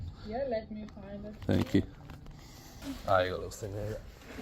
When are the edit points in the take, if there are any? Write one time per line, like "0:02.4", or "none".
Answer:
0:02.8